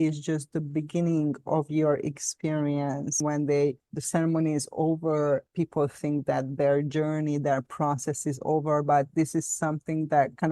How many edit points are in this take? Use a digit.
1